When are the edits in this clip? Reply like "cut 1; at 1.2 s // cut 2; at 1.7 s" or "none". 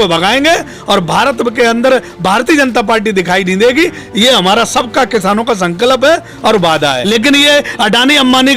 cut 1; at 7.0 s